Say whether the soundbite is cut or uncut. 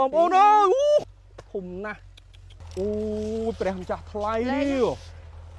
cut